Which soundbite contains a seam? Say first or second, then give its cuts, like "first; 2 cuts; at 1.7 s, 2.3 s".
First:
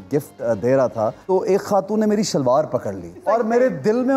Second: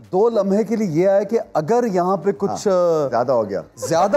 first; 2 cuts; at 1.2 s, 3.2 s